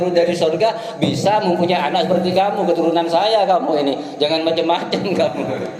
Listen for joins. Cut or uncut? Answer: uncut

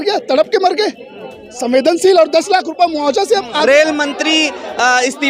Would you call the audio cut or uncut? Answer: cut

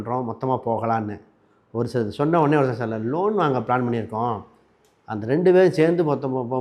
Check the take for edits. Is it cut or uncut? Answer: uncut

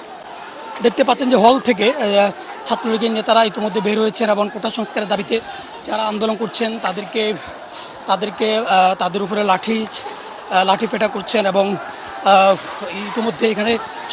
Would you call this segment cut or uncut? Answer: uncut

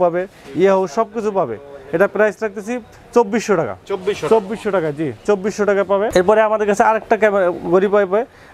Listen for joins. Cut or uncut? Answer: uncut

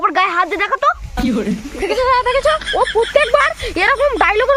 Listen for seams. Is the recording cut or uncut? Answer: uncut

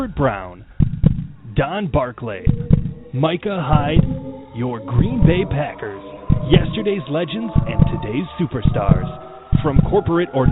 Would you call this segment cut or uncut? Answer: uncut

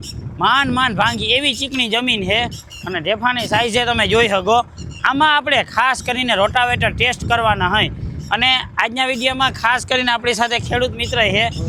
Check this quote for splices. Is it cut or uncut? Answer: uncut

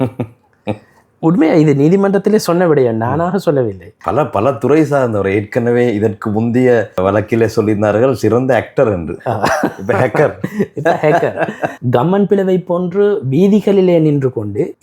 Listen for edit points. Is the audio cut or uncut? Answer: cut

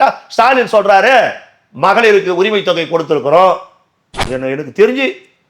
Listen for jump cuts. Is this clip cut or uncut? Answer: cut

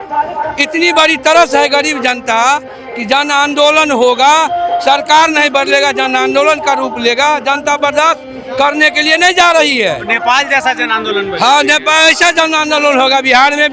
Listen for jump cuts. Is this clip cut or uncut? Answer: uncut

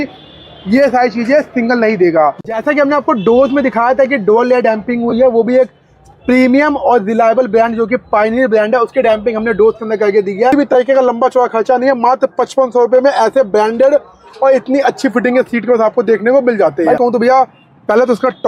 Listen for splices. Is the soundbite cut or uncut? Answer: cut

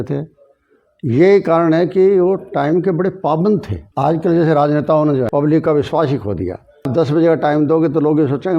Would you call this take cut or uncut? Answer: cut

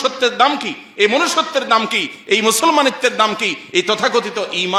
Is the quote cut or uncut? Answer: uncut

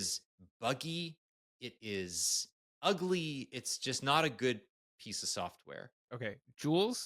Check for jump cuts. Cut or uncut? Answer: cut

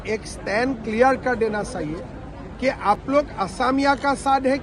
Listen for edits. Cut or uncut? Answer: uncut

